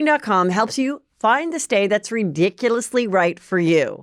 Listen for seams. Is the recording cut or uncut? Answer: uncut